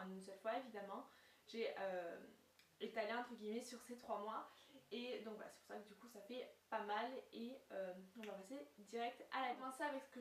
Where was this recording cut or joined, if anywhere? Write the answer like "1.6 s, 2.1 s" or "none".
6.6 s